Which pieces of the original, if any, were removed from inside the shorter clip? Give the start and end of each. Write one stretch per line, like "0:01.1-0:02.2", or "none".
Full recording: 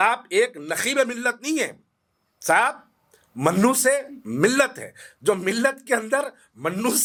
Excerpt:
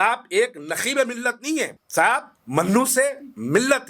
0:01.8-0:02.3
0:02.9-0:03.2